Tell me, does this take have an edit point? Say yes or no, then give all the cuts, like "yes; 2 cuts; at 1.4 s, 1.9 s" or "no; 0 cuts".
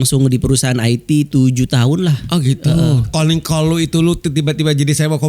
yes; 1 cut; at 3.1 s